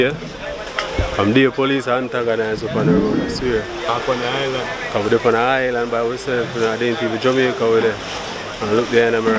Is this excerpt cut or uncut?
uncut